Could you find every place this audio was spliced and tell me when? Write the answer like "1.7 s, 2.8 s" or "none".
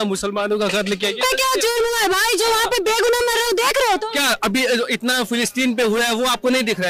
none